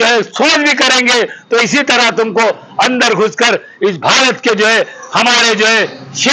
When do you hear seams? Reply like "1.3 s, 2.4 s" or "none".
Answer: none

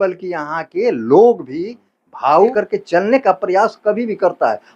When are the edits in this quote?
2.5 s

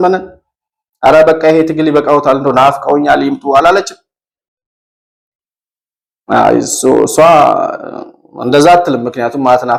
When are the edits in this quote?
none

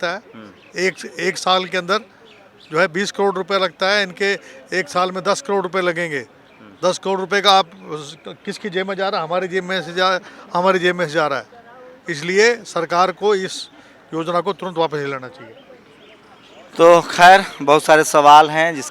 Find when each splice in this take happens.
none

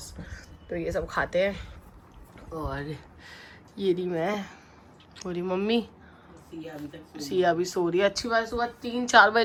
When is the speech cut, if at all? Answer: none

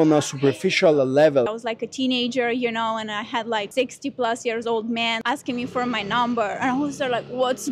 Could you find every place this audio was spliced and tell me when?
1.5 s, 3.7 s, 5.2 s

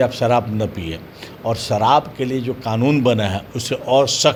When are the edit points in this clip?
none

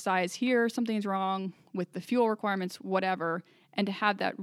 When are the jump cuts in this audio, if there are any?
none

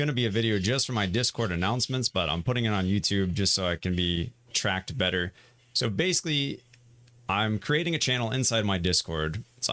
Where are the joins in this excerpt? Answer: none

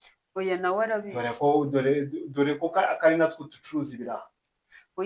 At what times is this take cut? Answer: 0.9 s

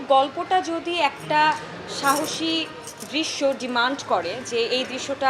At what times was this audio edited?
none

